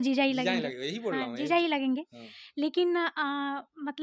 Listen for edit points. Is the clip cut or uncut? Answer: uncut